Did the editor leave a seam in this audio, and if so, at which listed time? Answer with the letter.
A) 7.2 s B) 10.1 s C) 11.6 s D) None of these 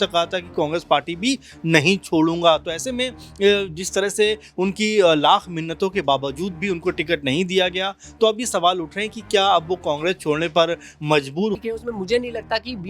C